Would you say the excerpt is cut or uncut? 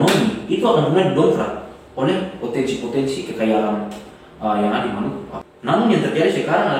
cut